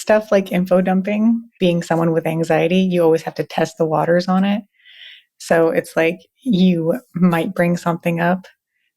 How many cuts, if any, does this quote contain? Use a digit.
1